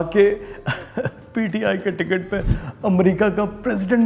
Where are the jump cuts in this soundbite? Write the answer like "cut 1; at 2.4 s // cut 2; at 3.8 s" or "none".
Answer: none